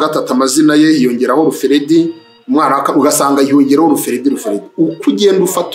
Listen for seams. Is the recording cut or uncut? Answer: uncut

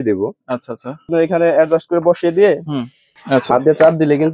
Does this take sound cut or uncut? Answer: cut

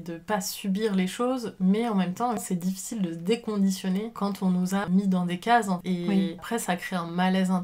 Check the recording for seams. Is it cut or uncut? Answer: cut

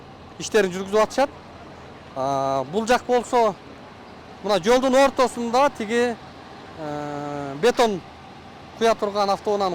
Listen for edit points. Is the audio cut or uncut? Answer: uncut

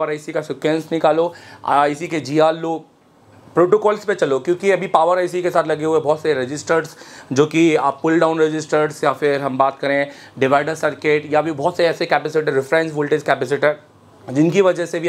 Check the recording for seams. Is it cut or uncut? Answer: uncut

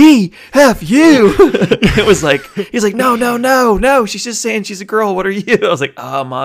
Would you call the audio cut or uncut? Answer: uncut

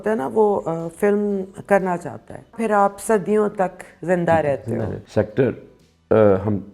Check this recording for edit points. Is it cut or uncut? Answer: cut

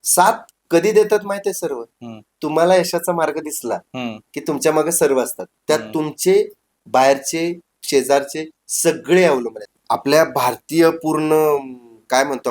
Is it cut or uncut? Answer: cut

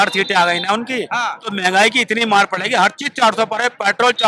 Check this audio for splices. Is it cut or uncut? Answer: uncut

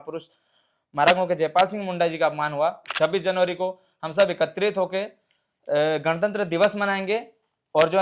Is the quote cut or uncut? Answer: cut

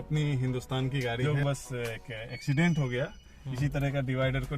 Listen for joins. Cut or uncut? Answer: cut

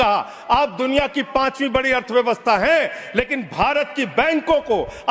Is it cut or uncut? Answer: uncut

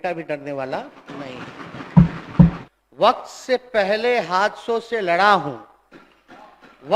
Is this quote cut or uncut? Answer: cut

